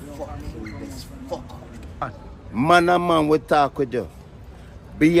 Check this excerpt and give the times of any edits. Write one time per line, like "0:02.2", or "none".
0:02.0

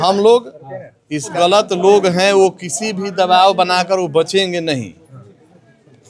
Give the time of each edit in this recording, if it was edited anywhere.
0:01.3

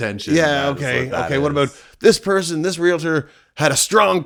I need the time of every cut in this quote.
none

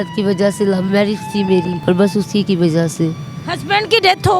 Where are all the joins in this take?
0:01.7

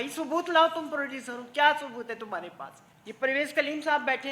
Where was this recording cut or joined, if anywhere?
0:03.2

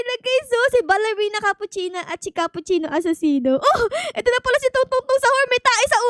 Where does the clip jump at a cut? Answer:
none

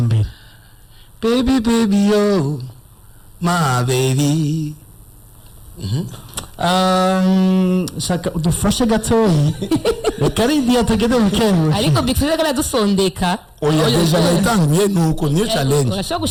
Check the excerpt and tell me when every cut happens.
none

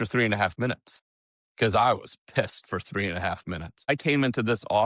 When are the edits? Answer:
0:03.9

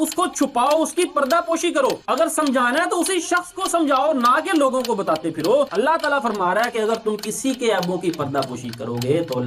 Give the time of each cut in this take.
none

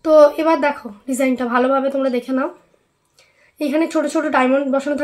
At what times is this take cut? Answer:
none

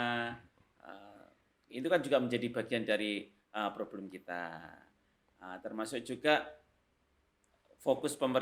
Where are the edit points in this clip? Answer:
none

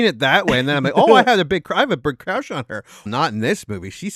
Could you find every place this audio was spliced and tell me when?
0:03.1

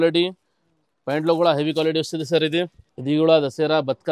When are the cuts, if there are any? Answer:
0:02.9

